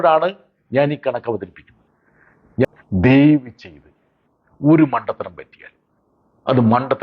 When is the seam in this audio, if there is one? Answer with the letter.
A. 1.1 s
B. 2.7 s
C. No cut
B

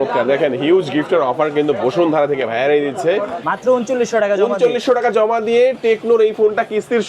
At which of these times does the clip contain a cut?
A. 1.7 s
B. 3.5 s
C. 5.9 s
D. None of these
B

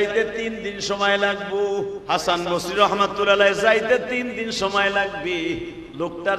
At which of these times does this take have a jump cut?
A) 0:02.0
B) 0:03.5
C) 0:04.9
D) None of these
A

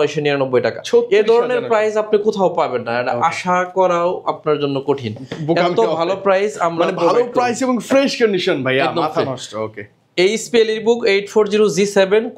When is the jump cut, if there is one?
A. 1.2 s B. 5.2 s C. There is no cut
C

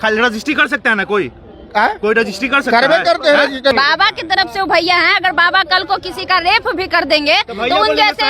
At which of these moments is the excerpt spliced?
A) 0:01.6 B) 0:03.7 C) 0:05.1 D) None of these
B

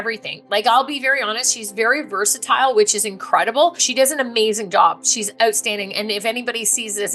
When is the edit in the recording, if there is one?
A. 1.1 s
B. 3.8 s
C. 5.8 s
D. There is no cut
B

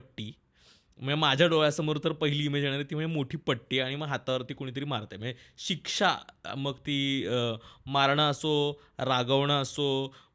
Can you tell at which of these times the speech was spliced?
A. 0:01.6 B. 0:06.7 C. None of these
C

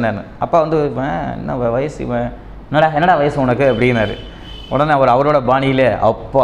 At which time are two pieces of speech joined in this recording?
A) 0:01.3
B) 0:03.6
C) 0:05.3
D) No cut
D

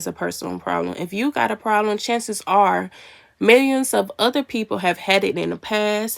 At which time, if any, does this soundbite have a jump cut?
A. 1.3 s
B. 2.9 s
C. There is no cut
C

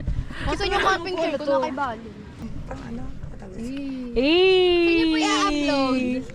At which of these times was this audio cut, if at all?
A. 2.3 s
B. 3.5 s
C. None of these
A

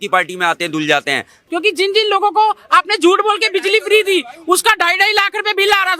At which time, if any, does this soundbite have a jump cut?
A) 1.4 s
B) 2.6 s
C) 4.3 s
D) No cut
A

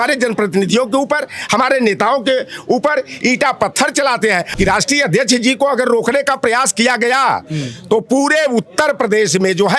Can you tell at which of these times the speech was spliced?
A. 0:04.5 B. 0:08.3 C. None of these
A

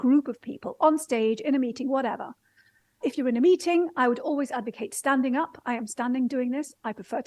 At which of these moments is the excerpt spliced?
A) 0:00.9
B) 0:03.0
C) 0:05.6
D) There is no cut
B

